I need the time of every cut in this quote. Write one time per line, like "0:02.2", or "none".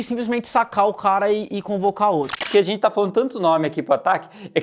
0:02.4